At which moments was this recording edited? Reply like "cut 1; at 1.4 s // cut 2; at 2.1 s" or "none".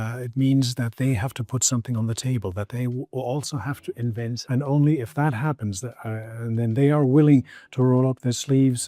cut 1; at 4.4 s